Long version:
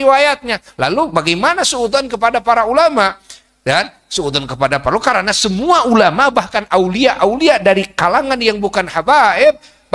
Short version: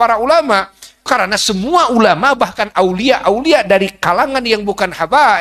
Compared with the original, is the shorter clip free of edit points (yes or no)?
no